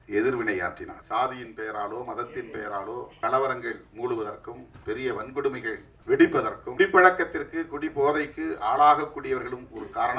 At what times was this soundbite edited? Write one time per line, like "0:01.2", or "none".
0:00.9
0:03.1
0:05.9
0:06.6